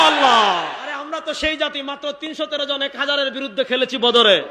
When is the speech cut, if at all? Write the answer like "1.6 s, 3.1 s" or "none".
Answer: 1.0 s